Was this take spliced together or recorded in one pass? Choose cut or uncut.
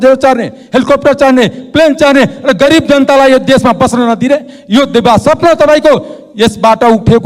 uncut